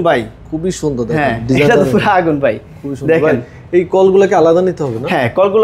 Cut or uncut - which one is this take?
uncut